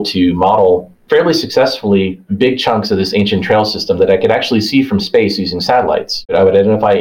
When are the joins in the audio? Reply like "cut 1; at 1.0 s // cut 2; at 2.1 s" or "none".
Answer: cut 1; at 0.9 s

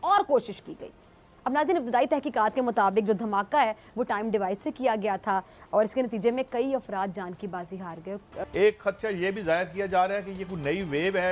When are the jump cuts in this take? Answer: cut 1; at 8.4 s

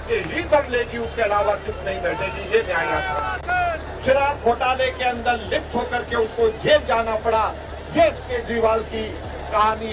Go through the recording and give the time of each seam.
cut 1; at 3.9 s

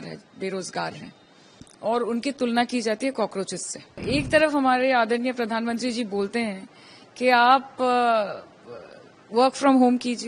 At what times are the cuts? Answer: cut 1; at 4.0 s

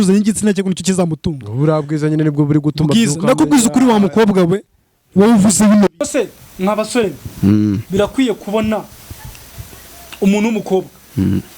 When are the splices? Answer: cut 1; at 6.0 s

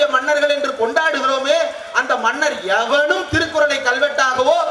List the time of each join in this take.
none

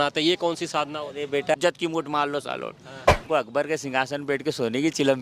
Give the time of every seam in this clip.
cut 1; at 1.5 s // cut 2; at 3.2 s

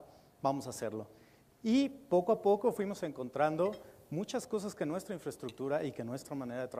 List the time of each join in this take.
cut 1; at 1.5 s

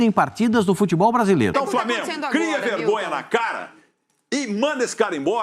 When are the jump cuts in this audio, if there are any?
cut 1; at 1.5 s

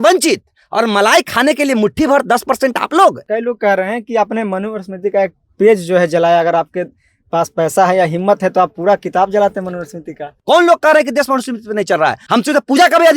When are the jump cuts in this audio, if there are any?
cut 1; at 3.2 s // cut 2; at 10.3 s

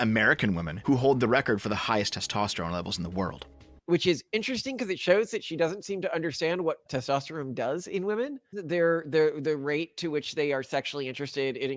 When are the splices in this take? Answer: cut 1; at 3.8 s // cut 2; at 8.6 s

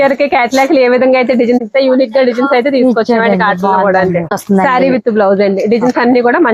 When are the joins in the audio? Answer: cut 1; at 1.7 s // cut 2; at 4.3 s

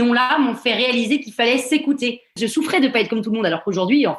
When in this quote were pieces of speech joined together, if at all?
cut 1; at 2.4 s

